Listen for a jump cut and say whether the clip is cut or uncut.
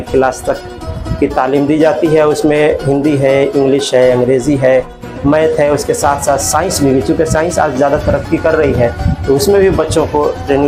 uncut